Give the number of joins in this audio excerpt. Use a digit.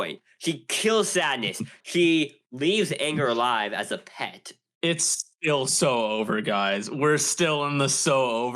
1